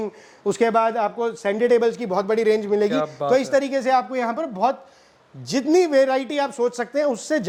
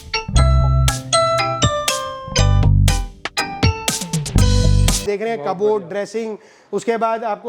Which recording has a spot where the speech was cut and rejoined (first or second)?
second